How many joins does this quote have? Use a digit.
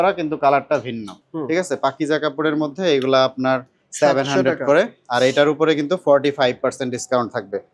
1